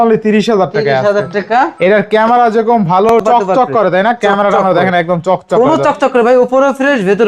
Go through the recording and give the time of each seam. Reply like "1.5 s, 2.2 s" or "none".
3.2 s